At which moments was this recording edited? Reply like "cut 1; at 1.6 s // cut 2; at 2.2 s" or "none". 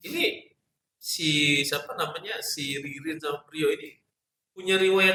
none